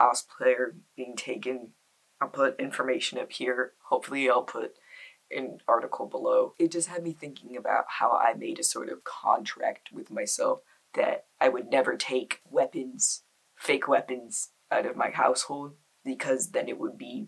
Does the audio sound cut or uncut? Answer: uncut